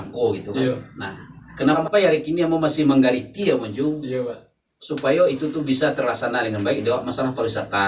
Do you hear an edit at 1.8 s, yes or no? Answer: yes